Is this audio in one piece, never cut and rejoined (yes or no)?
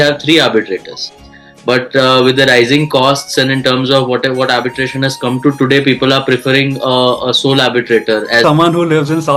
no